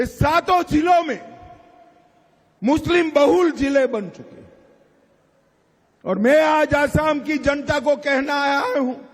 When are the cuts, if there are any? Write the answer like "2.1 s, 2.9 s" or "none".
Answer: 7.2 s

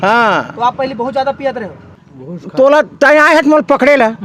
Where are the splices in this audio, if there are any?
1.8 s

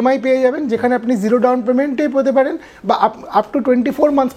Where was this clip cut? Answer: none

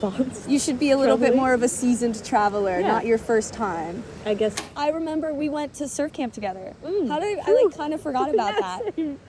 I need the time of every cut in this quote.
4.6 s

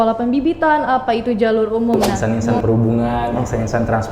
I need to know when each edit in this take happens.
2.1 s

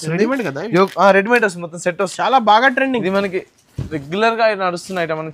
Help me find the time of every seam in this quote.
2.1 s

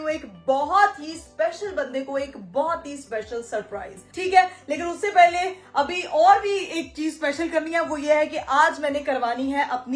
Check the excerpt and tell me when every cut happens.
none

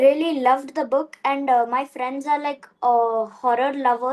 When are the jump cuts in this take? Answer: none

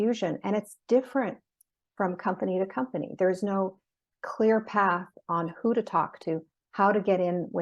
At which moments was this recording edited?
4.0 s

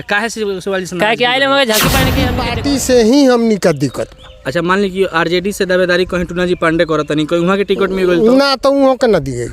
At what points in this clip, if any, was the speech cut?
2.4 s

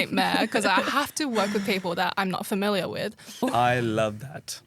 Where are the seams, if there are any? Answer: 3.4 s

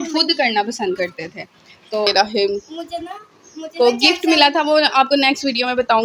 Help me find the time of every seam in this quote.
2.1 s

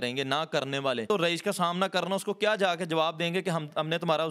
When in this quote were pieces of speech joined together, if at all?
1.1 s

